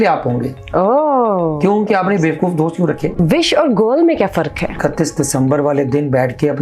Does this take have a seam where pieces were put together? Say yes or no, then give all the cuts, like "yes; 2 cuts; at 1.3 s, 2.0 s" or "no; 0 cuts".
yes; 2 cuts; at 3.1 s, 4.8 s